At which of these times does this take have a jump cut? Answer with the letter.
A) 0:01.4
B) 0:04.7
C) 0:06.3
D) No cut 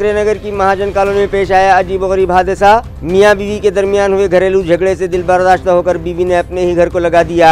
D